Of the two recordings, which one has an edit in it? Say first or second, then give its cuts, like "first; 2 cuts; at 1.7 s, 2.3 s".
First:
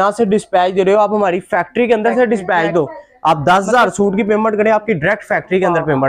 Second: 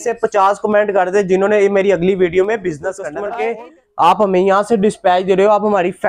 second; 1 cut; at 3.1 s